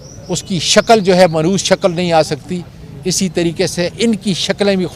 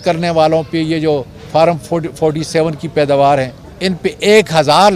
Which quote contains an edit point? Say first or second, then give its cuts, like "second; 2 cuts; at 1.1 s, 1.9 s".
second; 1 cut; at 3.6 s